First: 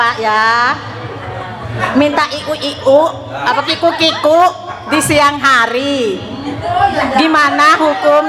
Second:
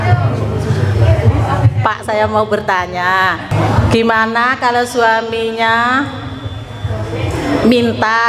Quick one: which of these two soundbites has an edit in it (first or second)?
second